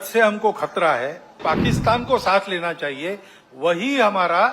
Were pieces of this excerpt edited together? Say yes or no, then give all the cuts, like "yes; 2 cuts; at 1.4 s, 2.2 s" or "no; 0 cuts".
yes; 1 cut; at 1.4 s